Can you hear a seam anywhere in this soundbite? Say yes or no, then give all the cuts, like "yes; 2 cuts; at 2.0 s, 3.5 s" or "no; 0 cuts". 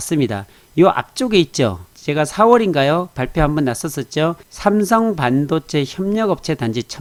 no; 0 cuts